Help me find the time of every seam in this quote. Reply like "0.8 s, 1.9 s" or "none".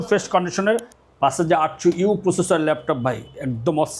1.0 s

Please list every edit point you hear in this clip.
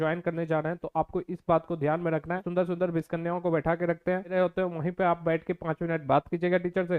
2.5 s, 4.3 s

